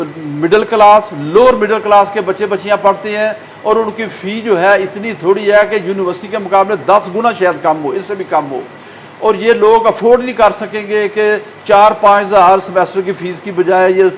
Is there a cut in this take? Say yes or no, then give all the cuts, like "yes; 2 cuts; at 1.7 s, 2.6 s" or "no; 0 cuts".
no; 0 cuts